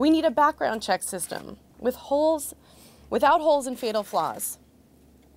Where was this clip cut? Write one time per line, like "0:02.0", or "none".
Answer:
0:03.4